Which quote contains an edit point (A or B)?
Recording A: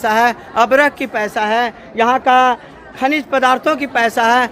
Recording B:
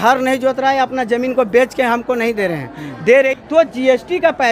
B